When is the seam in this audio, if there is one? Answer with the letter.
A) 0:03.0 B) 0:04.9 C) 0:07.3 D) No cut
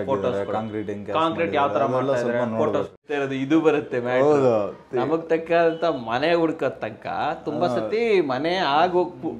A